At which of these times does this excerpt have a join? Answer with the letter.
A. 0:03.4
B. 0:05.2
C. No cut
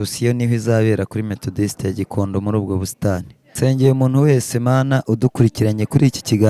A